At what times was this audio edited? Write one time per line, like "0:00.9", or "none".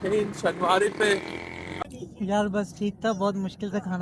0:01.7